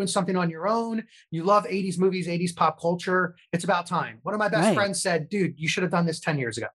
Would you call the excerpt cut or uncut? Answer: uncut